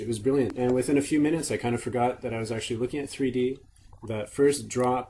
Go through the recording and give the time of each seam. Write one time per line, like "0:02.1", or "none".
0:01.2